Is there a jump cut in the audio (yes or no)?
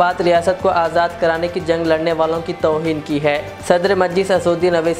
no